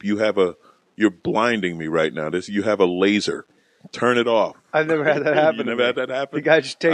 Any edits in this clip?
no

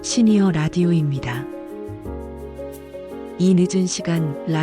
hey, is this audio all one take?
yes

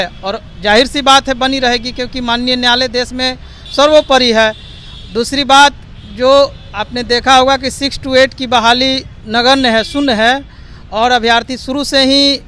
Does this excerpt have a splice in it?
no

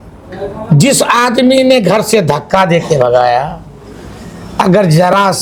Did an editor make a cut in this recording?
no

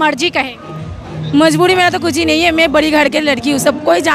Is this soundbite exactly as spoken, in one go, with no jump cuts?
yes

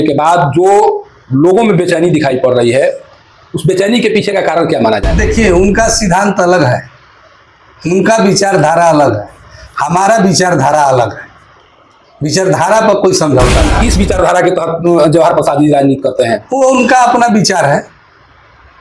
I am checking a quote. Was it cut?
yes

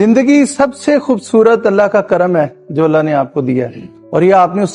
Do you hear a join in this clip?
no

